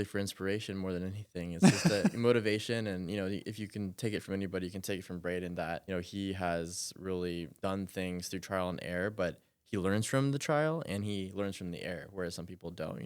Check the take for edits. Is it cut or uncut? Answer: cut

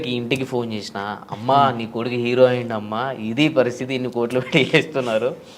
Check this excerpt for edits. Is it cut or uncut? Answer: uncut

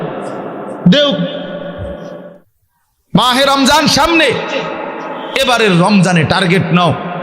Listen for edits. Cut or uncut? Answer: cut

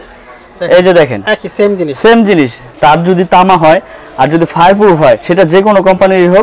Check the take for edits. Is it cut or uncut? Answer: cut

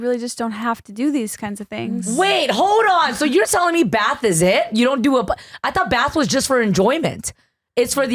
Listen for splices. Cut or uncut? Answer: uncut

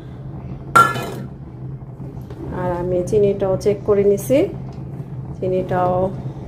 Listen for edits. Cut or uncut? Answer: uncut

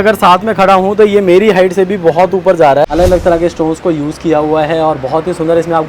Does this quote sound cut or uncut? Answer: cut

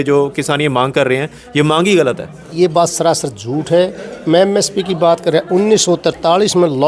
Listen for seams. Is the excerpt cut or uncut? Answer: cut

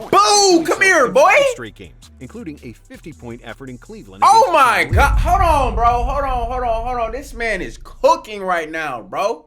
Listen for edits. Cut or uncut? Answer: uncut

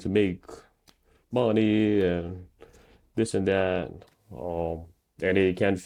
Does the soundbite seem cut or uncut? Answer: uncut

